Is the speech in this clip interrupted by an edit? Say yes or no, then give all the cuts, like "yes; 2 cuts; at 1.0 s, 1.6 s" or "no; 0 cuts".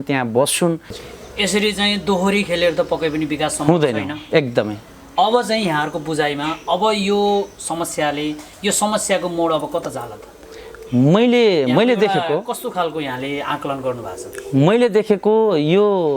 yes; 1 cut; at 0.9 s